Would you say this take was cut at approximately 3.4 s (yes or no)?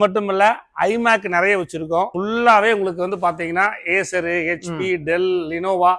no